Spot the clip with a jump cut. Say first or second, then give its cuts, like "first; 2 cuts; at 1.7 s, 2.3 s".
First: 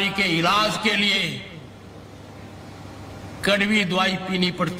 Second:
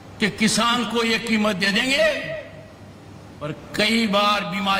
second; 1 cut; at 3.5 s